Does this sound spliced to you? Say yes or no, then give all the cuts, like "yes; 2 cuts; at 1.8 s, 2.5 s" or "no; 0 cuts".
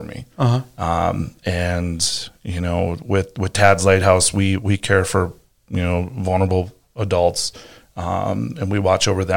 no; 0 cuts